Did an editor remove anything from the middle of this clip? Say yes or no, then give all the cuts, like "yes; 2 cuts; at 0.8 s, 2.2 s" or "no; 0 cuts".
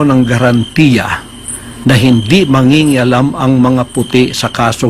no; 0 cuts